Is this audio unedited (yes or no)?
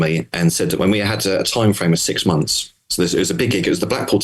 yes